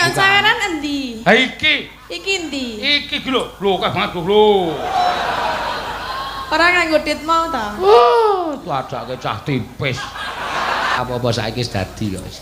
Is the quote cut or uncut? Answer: cut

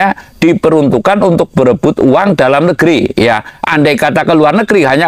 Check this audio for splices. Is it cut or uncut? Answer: uncut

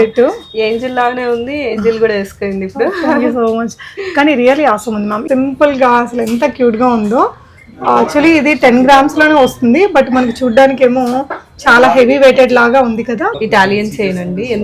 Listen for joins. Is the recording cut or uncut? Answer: cut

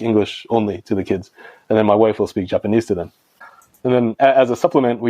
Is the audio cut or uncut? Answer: cut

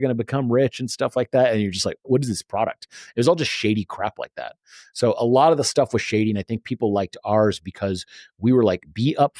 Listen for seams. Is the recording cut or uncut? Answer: cut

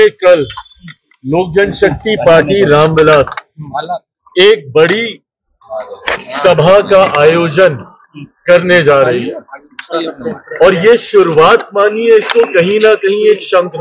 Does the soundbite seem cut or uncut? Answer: uncut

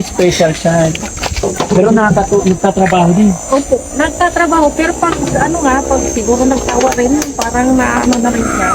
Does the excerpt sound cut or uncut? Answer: cut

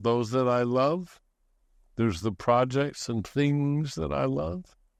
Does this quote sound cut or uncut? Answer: uncut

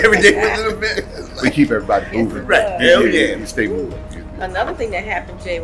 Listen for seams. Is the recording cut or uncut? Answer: cut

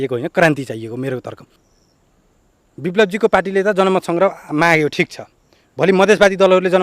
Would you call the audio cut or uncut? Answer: cut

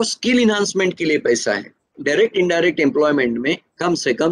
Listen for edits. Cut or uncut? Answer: cut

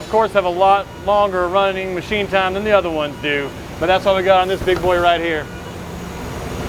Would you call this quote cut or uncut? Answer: uncut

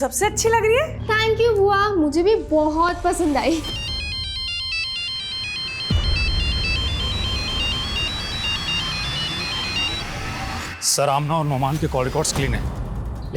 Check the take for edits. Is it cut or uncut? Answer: uncut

